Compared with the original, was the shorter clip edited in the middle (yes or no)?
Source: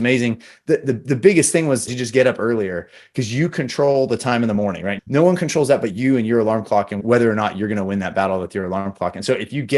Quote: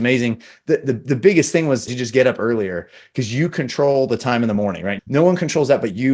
no